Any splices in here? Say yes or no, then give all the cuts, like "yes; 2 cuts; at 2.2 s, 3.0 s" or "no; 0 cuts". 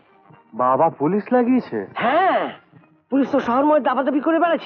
no; 0 cuts